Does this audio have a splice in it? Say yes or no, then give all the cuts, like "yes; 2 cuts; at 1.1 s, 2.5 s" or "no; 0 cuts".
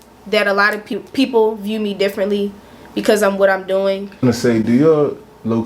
yes; 2 cuts; at 0.9 s, 4.2 s